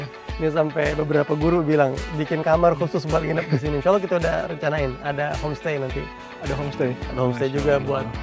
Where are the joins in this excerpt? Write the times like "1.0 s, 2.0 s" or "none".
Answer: none